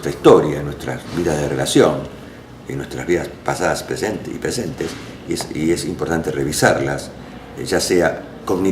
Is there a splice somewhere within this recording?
yes; 1 cut; at 5.1 s

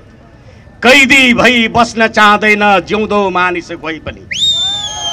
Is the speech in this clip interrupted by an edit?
no; 0 cuts

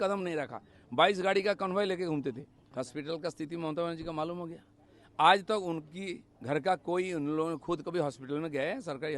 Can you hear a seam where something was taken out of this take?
yes; 1 cut; at 2.5 s

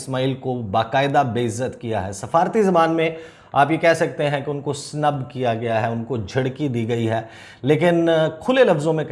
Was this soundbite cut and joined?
no; 0 cuts

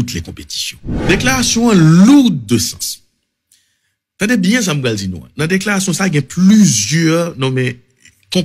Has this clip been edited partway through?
yes; 1 cut; at 1.0 s

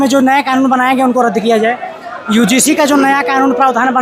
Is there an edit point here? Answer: no; 0 cuts

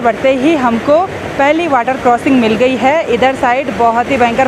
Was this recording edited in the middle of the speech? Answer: no; 0 cuts

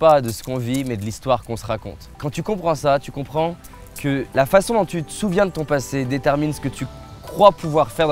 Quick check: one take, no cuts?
no; 2 cuts; at 2.2 s, 4.3 s

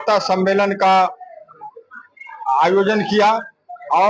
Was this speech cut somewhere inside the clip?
no; 0 cuts

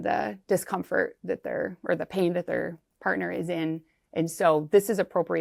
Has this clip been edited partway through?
no; 0 cuts

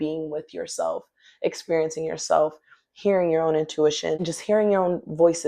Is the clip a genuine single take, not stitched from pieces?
no; 1 cut; at 4.3 s

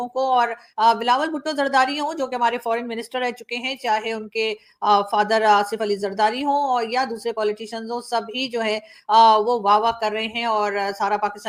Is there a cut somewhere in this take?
no; 0 cuts

